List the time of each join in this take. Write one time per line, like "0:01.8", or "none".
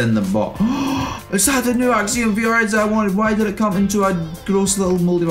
none

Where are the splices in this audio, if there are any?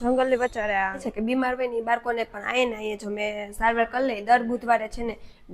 0:01.1

